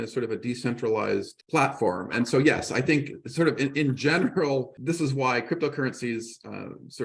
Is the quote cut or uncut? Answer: cut